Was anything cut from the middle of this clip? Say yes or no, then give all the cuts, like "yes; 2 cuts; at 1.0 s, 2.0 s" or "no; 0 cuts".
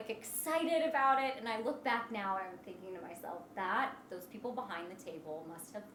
no; 0 cuts